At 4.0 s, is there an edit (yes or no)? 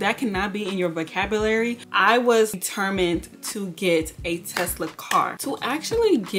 no